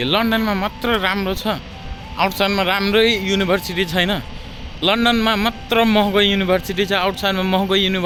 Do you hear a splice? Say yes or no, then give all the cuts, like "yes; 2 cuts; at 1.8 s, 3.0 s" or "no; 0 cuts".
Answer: no; 0 cuts